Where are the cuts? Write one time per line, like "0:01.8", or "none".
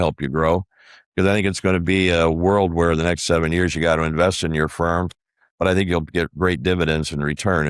none